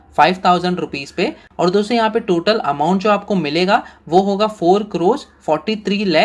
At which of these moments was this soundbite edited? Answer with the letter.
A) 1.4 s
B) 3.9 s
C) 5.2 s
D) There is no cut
A